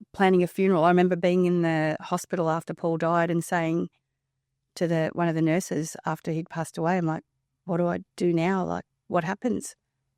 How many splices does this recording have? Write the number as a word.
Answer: zero